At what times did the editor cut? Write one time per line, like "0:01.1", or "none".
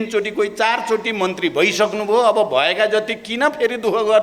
none

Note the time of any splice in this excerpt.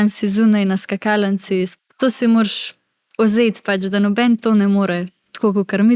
0:01.7

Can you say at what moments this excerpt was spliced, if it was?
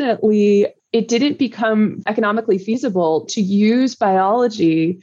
0:02.0

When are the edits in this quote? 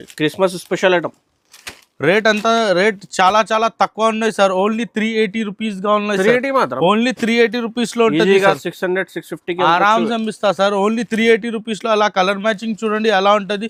none

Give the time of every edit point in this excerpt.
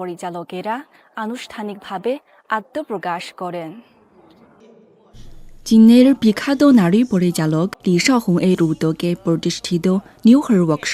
none

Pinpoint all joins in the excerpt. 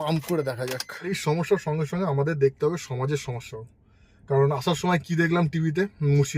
0:01.2

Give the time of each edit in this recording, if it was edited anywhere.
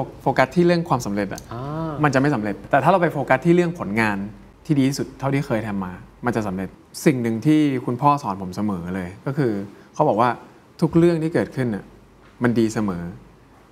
0:02.6
0:04.5
0:06.7

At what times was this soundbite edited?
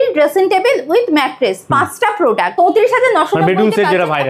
0:02.5

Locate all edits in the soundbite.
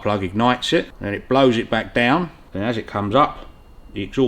0:01.0
0:02.4

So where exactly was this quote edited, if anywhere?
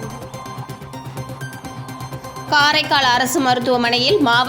0:01.0
0:02.0

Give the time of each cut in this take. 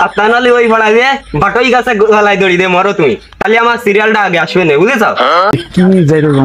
0:05.5

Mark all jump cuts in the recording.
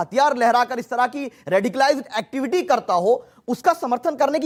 none

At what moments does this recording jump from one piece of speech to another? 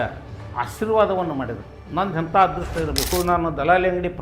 0:03.1

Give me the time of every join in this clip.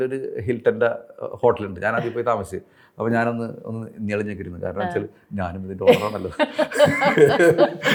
none

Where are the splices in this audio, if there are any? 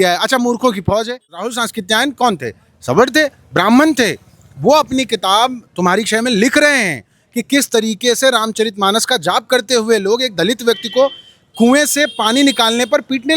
0:01.6

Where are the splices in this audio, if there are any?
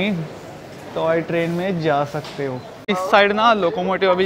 0:02.9

